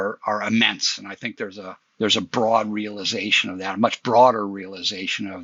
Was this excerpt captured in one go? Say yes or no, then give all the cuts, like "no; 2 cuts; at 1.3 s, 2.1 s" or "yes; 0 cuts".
yes; 0 cuts